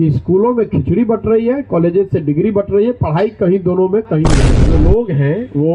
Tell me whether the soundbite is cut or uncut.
cut